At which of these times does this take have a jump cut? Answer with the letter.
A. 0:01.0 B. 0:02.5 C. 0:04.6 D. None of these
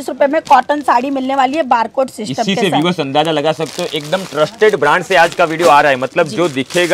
D